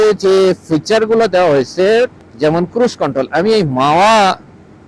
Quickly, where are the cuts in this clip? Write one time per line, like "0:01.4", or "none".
0:02.2

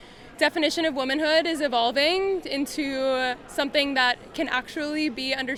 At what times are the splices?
none

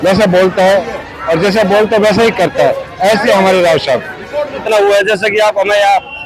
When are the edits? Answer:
0:04.6

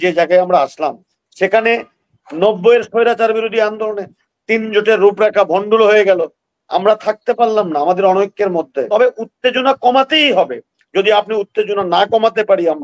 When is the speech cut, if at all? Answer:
0:08.9

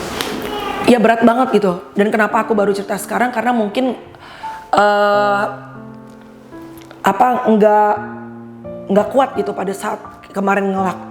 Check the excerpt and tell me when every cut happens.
0:05.6
0:06.9

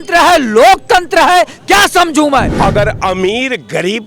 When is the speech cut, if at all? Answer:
0:02.5

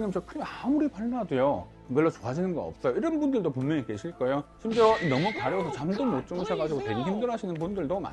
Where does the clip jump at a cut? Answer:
0:01.8
0:04.5

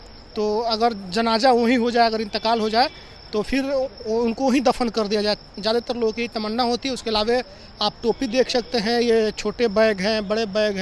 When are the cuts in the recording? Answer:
none

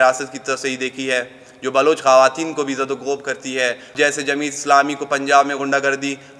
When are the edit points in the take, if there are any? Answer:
0:03.9

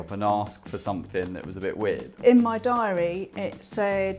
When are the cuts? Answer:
0:02.1

